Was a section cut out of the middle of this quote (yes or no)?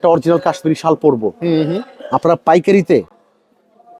no